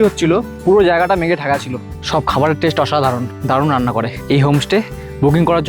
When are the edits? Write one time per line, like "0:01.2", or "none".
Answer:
0:02.0
0:03.3
0:04.2